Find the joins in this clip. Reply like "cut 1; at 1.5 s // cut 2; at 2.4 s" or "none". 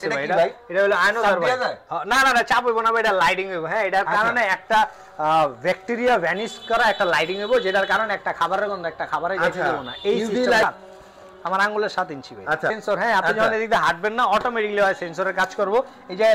cut 1; at 10.6 s // cut 2; at 12.8 s

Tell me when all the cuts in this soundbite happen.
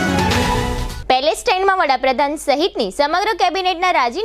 cut 1; at 0.9 s

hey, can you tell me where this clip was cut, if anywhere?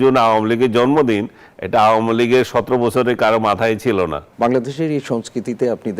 cut 1; at 4.2 s

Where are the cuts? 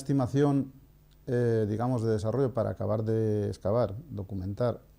cut 1; at 3.3 s

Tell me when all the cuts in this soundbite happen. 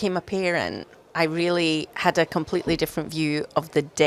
none

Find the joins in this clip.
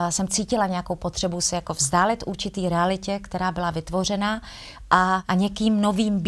cut 1; at 5.2 s

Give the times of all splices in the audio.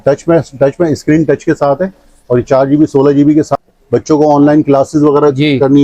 cut 1; at 3.5 s

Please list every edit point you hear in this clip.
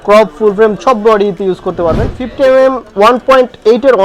cut 1; at 2.2 s

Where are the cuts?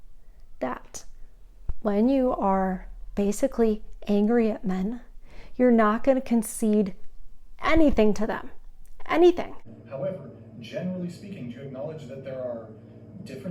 cut 1; at 9.3 s

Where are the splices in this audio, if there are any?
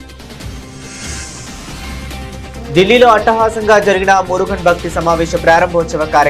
cut 1; at 0.8 s // cut 2; at 2.7 s

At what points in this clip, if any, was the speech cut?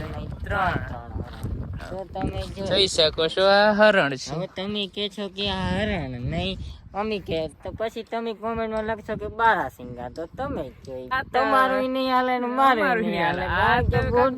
cut 1; at 1.8 s // cut 2; at 11.1 s

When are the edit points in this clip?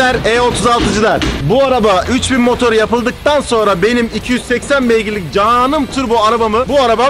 none

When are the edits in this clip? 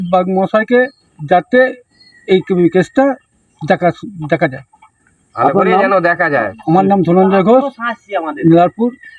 none

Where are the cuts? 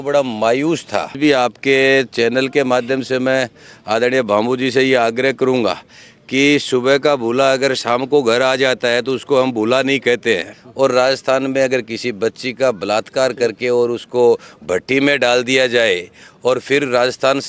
cut 1; at 1.1 s // cut 2; at 10.5 s

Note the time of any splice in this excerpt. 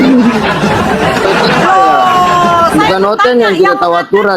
cut 1; at 1.2 s

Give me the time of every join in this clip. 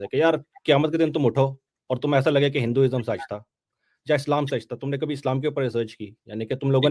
none

